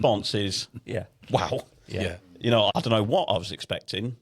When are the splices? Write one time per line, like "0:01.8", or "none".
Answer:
0:02.7